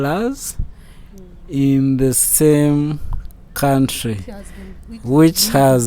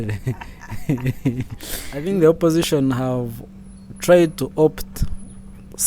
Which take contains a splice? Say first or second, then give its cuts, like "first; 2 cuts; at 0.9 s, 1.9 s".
second; 1 cut; at 2.0 s